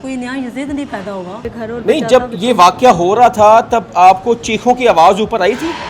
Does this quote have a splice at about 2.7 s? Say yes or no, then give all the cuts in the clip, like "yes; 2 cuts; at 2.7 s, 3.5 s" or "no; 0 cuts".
no; 1 cut; at 1.5 s